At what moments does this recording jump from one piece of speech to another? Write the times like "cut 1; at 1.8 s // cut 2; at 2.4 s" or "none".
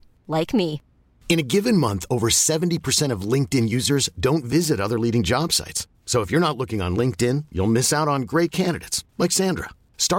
none